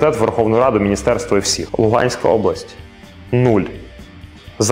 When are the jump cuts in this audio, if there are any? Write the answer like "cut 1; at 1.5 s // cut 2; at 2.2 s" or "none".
cut 1; at 1.6 s